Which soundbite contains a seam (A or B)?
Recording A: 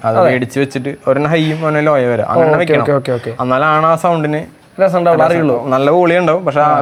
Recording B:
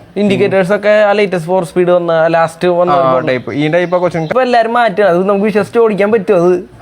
B